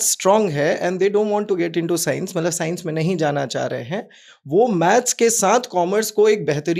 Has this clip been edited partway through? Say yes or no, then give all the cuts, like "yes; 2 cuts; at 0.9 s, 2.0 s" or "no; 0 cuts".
no; 0 cuts